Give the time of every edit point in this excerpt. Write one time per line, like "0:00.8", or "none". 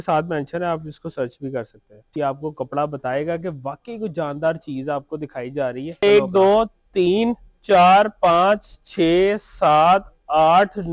0:02.1
0:06.0